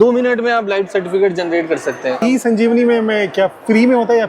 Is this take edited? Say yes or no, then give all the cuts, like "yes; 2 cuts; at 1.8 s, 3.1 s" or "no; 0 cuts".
yes; 1 cut; at 2.2 s